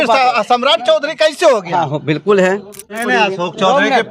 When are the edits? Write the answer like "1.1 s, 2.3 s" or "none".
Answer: 3.0 s